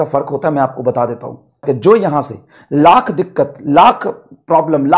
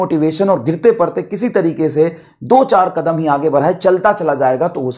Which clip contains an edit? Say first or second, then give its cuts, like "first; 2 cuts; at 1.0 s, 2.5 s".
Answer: first; 1 cut; at 1.6 s